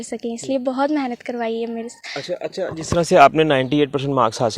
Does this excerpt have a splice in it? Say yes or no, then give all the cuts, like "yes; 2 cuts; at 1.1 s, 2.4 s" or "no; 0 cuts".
no; 0 cuts